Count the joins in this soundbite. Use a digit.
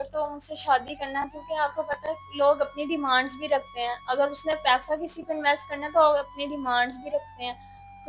0